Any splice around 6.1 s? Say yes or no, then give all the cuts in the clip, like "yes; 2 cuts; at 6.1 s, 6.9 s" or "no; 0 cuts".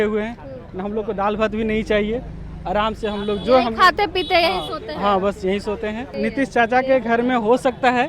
yes; 1 cut; at 6.1 s